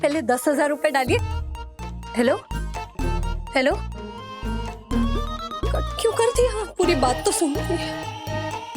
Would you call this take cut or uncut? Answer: cut